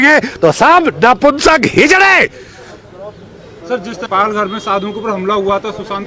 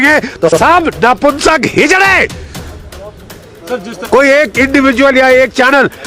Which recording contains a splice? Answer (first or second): second